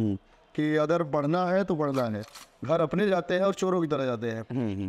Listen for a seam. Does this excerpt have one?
yes; 1 cut; at 2.2 s

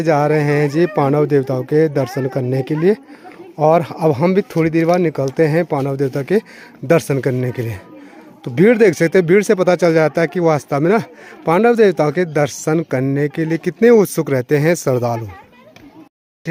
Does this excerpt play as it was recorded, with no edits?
yes; 0 cuts

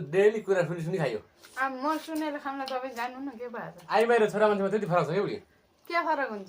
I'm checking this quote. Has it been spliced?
yes; 2 cuts; at 1.4 s, 3.8 s

